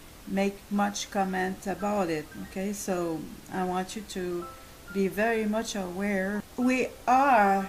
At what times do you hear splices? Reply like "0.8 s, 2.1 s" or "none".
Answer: 4.2 s